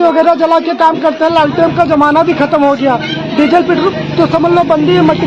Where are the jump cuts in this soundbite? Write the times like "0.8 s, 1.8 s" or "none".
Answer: none